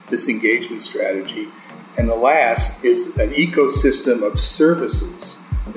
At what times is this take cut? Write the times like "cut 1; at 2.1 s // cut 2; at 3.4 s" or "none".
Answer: cut 1; at 1.6 s // cut 2; at 3.1 s